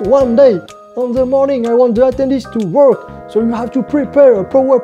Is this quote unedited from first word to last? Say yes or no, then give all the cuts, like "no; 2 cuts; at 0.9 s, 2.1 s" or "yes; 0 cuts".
yes; 0 cuts